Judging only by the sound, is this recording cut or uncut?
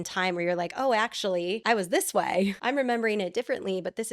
cut